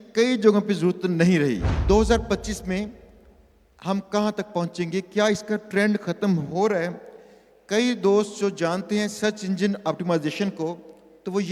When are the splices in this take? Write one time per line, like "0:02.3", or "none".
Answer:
0:01.7